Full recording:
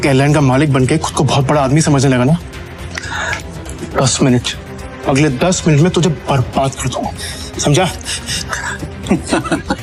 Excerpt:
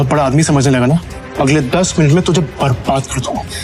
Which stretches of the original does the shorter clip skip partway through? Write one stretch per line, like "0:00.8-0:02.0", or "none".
0:02.6-0:04.9